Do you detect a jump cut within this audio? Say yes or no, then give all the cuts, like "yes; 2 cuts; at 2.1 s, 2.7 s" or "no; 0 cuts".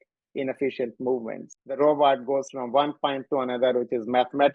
yes; 1 cut; at 1.8 s